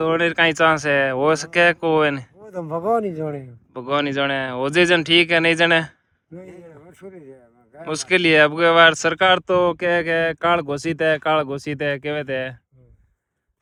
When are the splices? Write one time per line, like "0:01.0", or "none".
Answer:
none